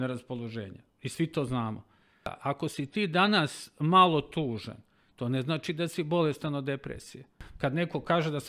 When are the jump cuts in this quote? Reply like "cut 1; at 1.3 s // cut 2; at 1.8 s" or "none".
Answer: cut 1; at 2.3 s // cut 2; at 7.4 s